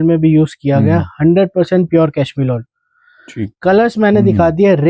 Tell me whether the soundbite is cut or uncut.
uncut